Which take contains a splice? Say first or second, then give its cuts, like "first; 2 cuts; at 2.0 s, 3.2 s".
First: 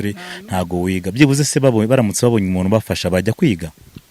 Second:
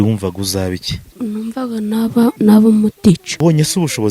second; 3 cuts; at 1.1 s, 2.4 s, 3.3 s